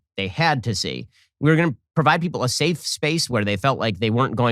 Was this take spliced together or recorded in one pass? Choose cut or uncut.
uncut